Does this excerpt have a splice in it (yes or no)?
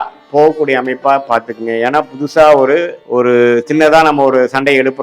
yes